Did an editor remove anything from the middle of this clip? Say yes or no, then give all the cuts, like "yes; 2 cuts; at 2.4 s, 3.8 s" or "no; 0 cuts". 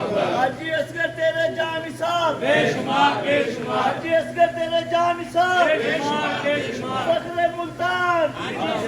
no; 0 cuts